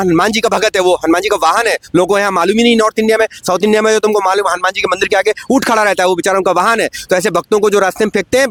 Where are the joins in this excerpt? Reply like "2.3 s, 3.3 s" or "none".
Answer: none